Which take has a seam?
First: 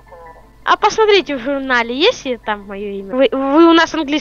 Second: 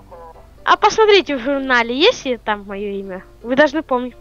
first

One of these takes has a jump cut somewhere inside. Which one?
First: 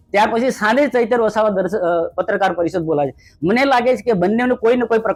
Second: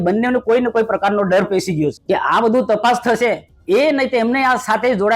second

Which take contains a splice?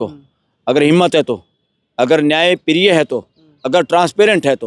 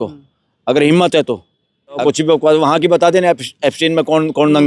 second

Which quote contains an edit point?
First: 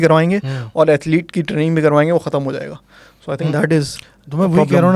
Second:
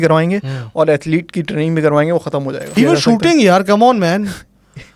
second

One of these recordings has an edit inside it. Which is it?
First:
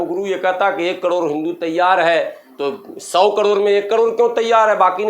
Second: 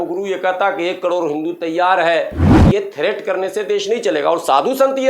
second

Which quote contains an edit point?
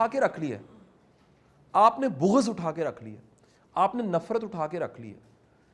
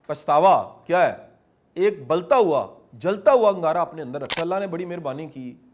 second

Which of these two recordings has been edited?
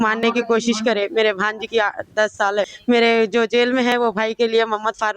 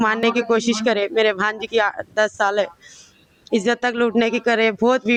first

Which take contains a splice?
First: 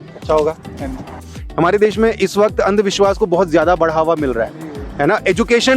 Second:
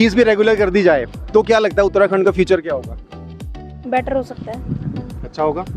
first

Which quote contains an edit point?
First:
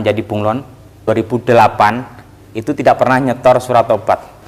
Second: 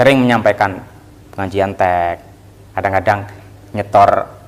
first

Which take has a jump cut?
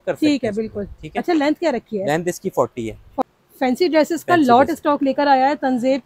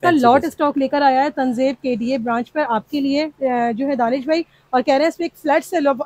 first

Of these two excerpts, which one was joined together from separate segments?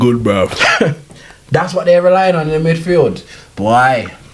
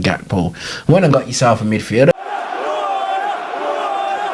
second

